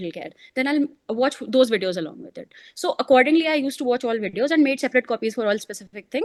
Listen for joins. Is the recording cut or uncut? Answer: uncut